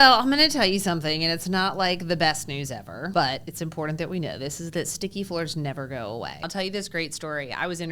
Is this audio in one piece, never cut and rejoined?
no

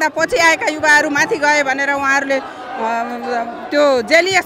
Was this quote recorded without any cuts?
yes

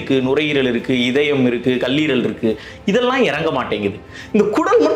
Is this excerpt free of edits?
yes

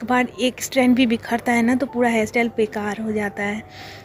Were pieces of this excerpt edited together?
no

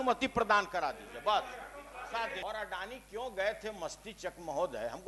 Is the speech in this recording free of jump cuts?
no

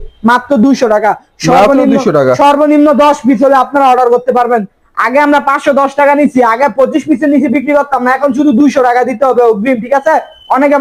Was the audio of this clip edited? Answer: no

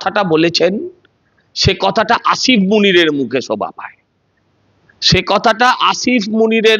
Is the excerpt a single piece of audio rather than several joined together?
yes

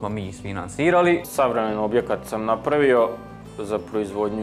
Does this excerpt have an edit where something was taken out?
yes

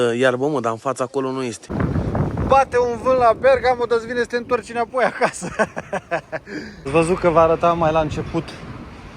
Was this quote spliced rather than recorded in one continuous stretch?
yes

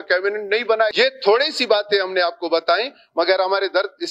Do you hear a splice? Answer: yes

